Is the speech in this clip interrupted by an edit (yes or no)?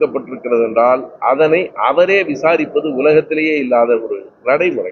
no